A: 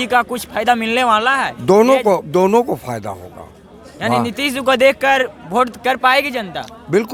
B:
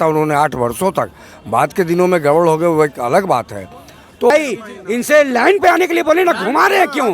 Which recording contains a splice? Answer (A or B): B